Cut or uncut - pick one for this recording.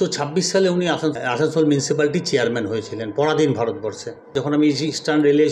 cut